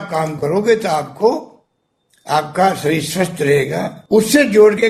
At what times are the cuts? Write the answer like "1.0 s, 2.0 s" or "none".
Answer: 4.0 s